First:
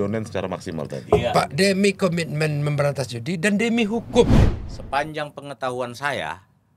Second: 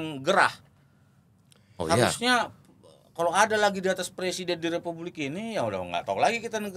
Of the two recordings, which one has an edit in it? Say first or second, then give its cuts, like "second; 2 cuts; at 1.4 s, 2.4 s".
first; 1 cut; at 4.4 s